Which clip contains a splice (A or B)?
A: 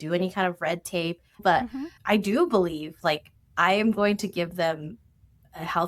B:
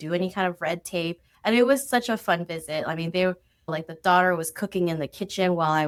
A